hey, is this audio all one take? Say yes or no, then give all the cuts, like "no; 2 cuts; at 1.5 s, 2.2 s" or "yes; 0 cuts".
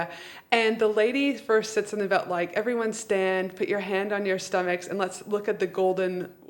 yes; 0 cuts